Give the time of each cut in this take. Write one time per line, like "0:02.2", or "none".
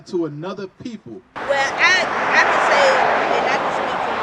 0:01.3

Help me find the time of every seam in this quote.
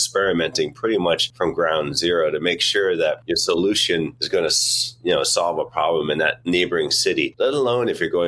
0:01.3
0:03.2
0:04.2
0:06.4
0:07.3

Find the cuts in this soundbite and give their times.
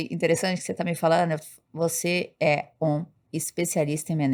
none

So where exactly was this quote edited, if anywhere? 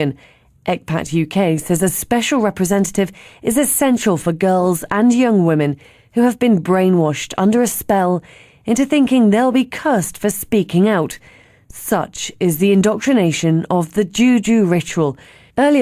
0:08.8

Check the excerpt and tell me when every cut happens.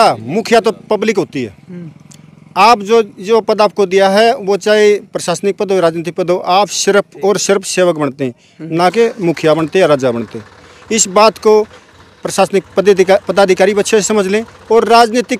none

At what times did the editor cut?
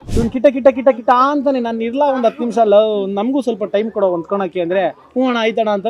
none

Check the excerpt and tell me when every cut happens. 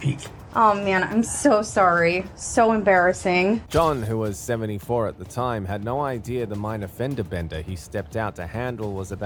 none

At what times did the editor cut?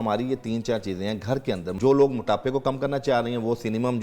0:01.7

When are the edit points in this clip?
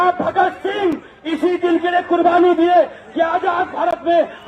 none

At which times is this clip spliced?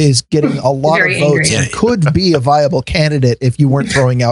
none

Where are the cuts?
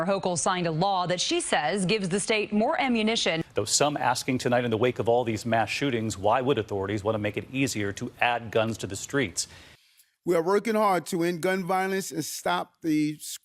0:03.4

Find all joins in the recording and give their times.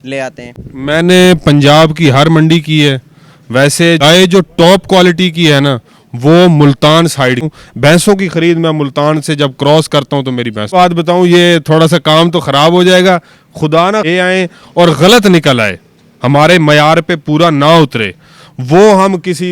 0:04.0
0:07.5
0:10.7
0:14.1

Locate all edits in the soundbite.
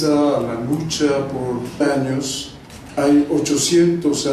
none

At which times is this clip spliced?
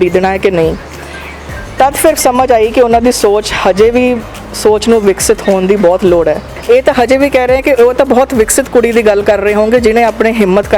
0:06.5

